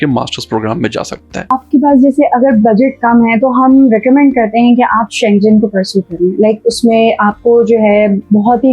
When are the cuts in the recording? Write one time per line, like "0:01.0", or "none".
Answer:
0:01.5